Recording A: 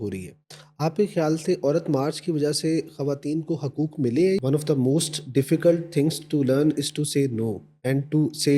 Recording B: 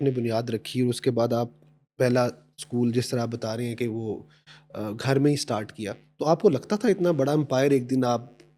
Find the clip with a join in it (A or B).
A